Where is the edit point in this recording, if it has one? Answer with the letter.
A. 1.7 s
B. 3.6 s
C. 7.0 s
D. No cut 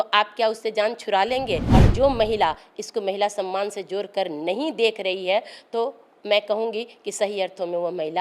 A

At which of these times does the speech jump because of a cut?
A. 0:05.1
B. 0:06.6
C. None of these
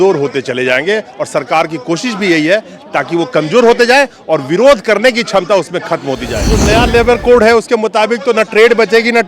B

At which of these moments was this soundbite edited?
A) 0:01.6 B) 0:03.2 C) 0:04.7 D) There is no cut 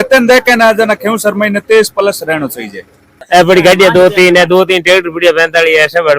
B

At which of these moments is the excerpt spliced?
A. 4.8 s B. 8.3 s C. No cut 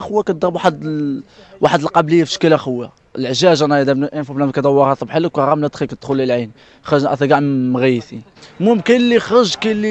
B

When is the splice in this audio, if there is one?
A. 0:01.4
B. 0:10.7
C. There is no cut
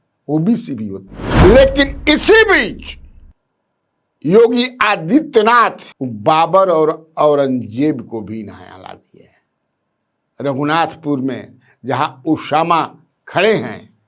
A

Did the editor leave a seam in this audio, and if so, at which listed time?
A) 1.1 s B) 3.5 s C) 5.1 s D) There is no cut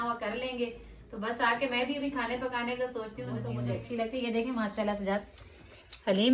B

